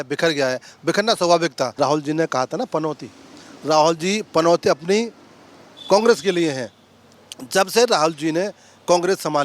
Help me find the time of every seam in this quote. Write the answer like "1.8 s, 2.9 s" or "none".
1.7 s